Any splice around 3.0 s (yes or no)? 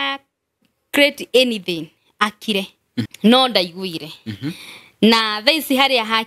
yes